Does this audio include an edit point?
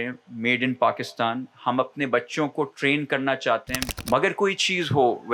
yes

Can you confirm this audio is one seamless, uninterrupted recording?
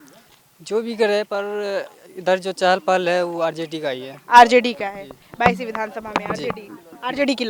yes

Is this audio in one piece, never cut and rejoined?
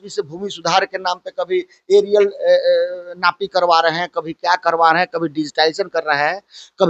yes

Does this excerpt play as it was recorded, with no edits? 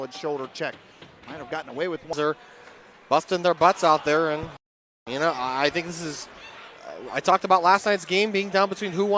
no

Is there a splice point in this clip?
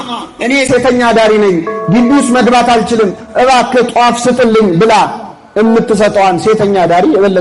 no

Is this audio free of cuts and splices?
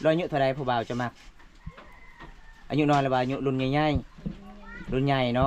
yes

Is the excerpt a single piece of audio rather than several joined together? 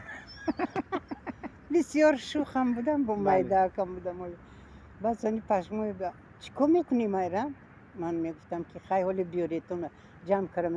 yes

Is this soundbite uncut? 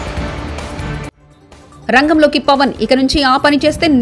yes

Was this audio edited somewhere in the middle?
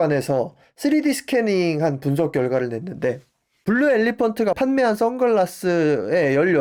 no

